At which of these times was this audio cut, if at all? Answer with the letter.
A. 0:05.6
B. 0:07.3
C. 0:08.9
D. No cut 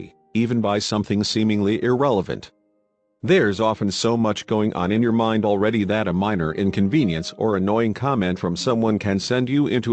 A